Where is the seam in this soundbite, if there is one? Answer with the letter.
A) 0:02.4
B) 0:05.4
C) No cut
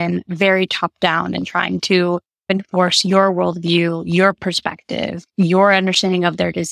A